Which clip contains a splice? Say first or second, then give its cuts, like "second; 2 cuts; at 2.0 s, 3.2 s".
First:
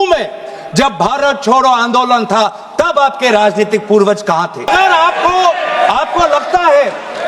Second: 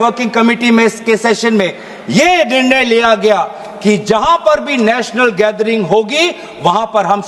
first; 1 cut; at 4.7 s